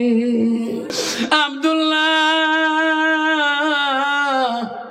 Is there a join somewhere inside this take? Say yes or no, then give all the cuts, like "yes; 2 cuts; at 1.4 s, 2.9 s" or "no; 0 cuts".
yes; 1 cut; at 1.0 s